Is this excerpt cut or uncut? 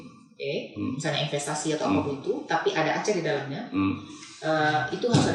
uncut